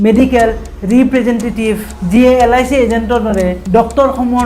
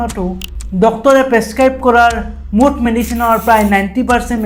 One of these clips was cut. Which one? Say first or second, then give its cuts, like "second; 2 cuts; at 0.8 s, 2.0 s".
first; 2 cuts; at 1.9 s, 3.6 s